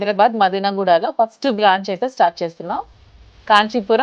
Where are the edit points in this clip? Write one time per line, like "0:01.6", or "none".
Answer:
none

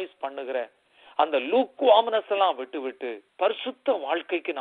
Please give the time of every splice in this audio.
0:03.2

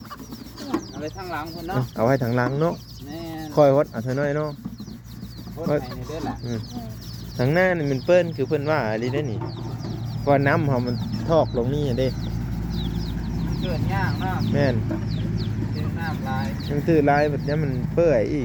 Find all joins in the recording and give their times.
none

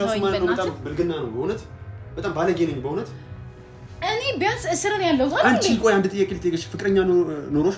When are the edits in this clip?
none

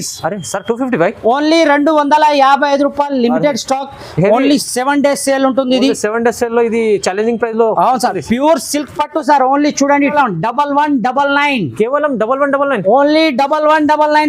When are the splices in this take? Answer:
0:10.1

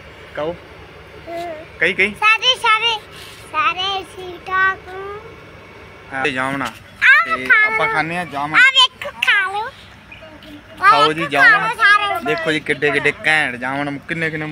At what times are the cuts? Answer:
0:06.2

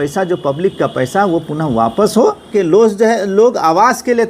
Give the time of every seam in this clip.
0:02.5

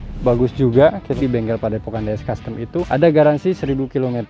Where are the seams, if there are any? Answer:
0:01.1
0:02.9

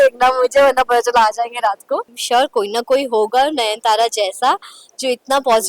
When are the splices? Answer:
0:02.1

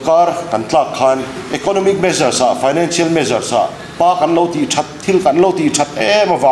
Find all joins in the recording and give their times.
0:01.4
0:03.8

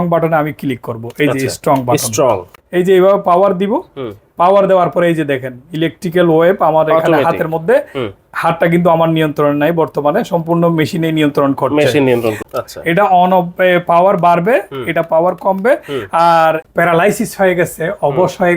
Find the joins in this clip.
0:02.6
0:12.4
0:16.6

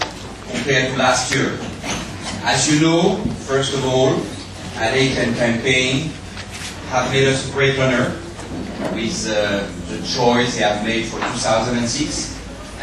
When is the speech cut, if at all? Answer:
none

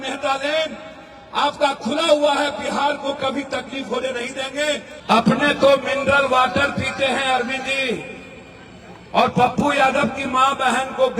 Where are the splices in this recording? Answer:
0:04.9

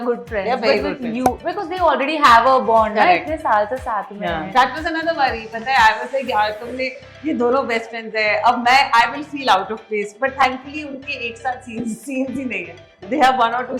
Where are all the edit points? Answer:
none

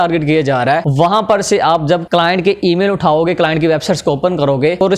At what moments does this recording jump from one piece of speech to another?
0:00.9
0:02.0

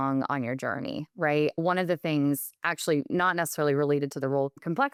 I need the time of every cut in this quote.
none

